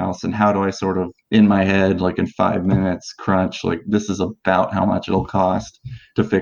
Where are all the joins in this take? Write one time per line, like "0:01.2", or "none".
none